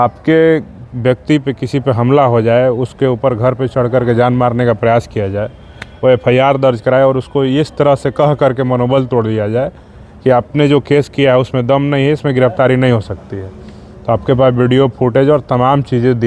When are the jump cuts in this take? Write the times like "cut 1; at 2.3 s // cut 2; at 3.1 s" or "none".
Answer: none

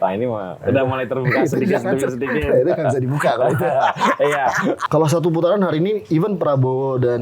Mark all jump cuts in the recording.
cut 1; at 4.8 s

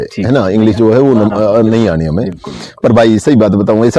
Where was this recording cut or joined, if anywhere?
none

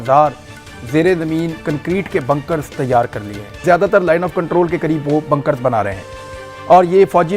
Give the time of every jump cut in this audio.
cut 1; at 3.6 s

